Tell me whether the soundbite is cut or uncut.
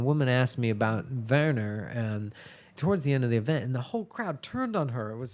cut